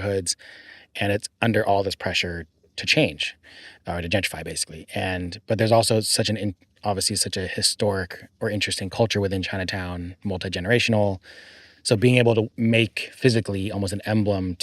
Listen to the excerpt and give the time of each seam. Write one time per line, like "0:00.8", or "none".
0:12.5